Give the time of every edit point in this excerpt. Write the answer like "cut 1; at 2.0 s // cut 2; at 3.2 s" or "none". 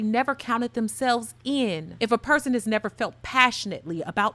cut 1; at 1.9 s